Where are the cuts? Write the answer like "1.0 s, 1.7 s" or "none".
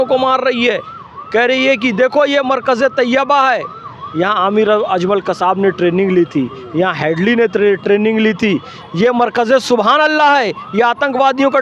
none